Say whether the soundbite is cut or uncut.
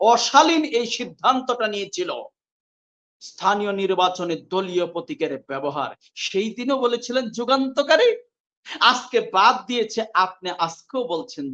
uncut